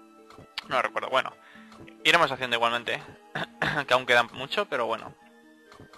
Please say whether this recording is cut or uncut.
cut